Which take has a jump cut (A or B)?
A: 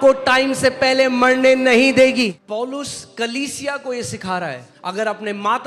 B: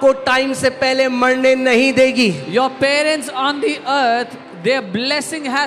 A